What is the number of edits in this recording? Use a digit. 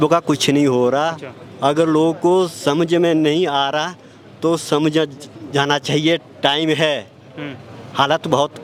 0